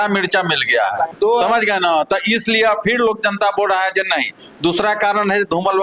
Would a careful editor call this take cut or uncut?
cut